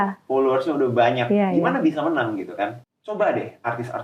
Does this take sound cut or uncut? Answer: cut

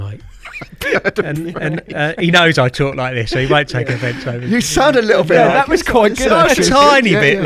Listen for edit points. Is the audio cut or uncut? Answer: uncut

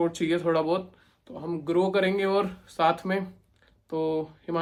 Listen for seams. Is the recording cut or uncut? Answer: uncut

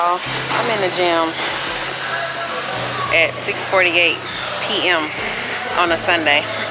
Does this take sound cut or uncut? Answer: uncut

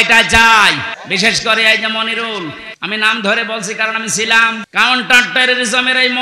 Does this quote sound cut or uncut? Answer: cut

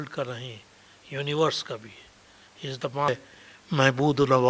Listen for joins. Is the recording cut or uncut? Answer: cut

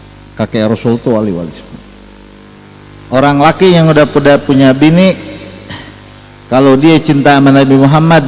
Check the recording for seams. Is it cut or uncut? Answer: cut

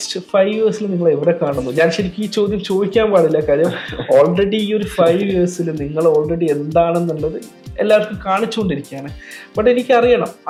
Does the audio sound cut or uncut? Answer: uncut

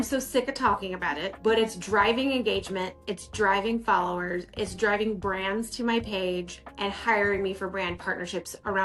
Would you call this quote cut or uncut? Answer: uncut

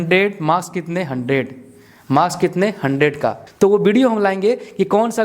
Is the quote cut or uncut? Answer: cut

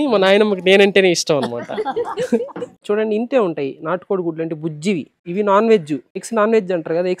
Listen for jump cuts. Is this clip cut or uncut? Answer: cut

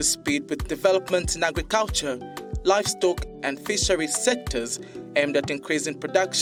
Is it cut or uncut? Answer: uncut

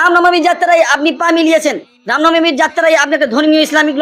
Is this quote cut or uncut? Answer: uncut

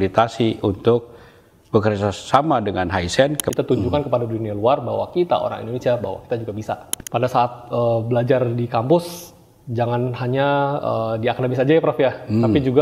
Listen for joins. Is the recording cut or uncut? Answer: cut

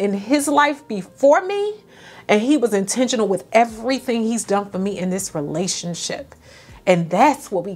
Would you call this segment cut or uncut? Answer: uncut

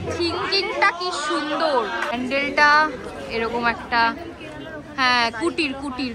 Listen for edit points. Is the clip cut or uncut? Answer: cut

